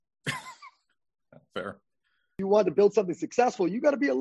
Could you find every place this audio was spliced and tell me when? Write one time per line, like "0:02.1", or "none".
0:02.3